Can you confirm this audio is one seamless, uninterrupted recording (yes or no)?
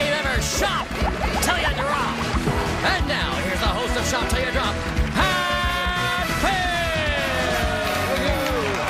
no